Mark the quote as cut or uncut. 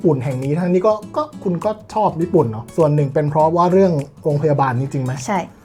cut